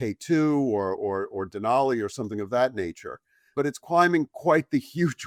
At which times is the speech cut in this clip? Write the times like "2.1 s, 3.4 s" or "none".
none